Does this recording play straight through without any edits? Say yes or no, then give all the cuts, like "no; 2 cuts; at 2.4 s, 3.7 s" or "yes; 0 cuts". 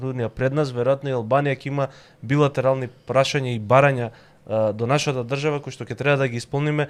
yes; 0 cuts